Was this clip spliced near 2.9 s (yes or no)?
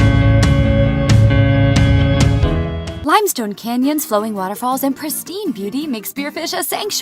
yes